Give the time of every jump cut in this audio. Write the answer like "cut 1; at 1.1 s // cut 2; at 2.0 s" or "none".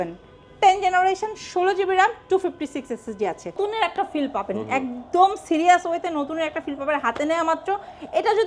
cut 1; at 3.6 s